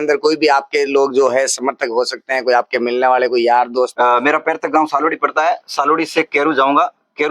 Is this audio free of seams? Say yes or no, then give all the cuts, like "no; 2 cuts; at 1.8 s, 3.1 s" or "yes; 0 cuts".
no; 1 cut; at 3.9 s